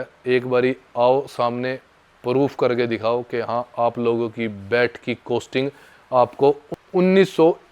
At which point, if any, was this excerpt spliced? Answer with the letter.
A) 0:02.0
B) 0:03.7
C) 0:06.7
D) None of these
C